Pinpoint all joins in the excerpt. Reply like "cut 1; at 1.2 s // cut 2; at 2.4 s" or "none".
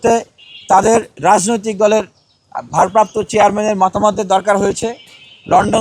cut 1; at 1.1 s